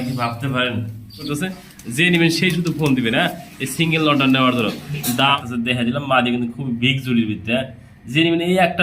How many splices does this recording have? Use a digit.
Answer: 2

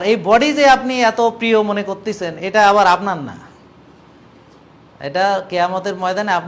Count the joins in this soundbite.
0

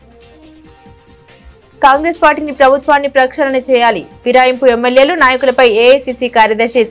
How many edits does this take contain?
1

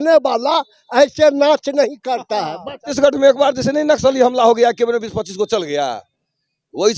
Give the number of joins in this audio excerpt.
1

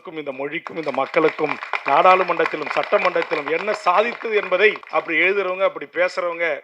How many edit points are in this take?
1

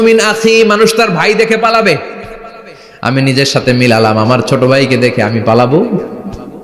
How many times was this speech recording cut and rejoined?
0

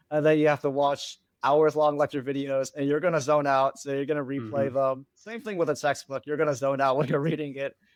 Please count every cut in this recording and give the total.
0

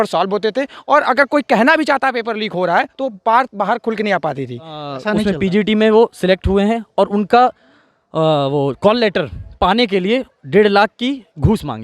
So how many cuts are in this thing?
1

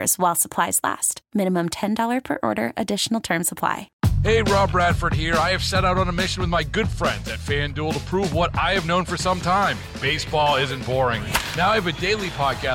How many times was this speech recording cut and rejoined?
1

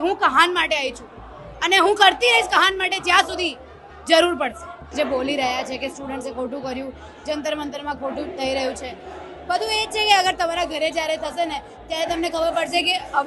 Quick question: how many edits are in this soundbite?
1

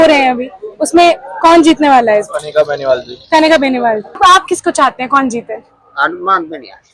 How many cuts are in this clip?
1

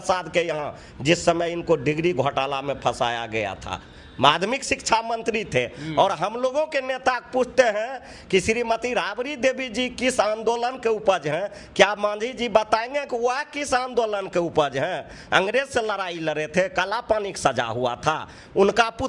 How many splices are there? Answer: 0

